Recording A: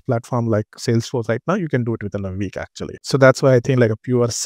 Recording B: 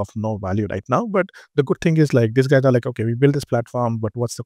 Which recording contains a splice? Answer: A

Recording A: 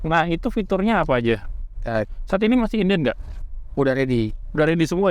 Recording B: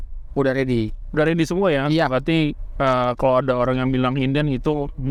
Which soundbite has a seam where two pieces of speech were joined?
A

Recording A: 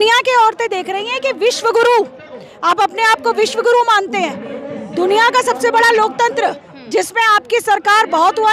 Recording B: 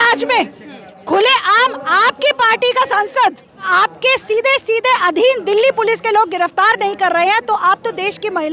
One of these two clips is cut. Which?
B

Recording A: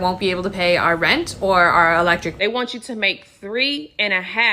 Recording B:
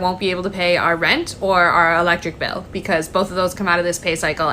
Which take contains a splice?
A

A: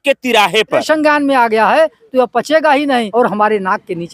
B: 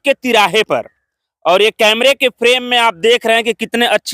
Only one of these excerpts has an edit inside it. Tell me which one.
A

